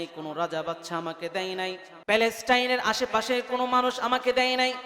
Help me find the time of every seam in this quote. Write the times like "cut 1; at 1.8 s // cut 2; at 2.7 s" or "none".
cut 1; at 1.9 s